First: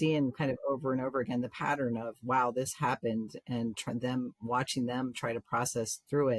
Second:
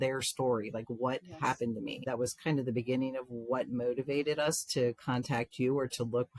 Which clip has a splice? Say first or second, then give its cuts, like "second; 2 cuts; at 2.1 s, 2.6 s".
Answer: second; 1 cut; at 2.1 s